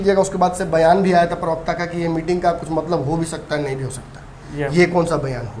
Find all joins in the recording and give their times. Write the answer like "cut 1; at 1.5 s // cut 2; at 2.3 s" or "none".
none

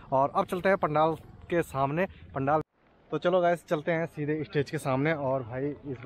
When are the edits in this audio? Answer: cut 1; at 2.6 s

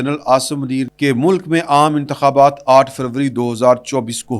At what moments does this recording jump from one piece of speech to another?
cut 1; at 0.9 s

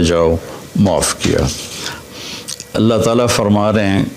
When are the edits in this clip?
cut 1; at 2.0 s

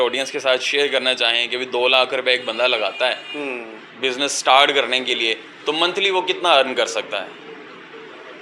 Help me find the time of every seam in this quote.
none

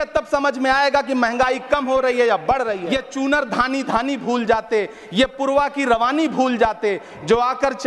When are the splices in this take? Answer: cut 1; at 2.8 s

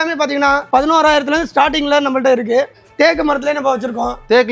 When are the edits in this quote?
cut 1; at 2.8 s

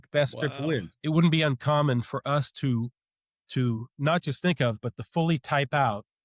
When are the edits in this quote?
cut 1; at 0.9 s

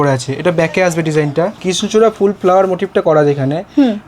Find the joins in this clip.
cut 1; at 1.6 s

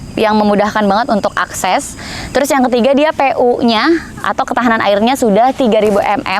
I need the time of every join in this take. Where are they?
none

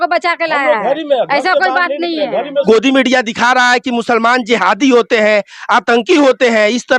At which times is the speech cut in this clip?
cut 1; at 2.6 s

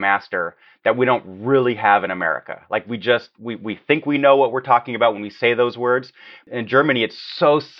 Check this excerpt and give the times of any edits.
cut 1; at 6.4 s

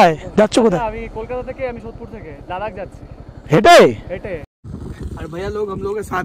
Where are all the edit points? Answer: cut 1; at 4.6 s

